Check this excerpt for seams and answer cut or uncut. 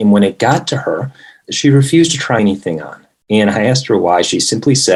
uncut